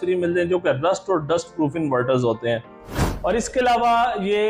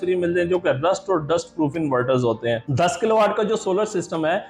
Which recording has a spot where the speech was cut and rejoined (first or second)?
second